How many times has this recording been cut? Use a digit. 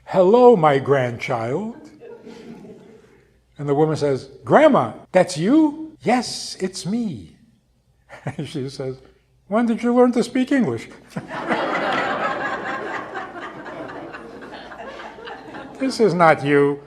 2